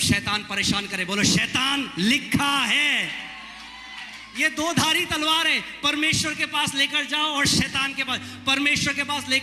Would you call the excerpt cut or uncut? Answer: uncut